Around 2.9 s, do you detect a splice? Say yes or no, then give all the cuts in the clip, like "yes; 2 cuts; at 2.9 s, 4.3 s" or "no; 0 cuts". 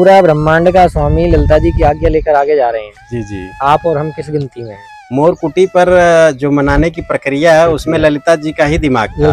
no; 0 cuts